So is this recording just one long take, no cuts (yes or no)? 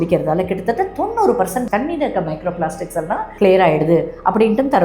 no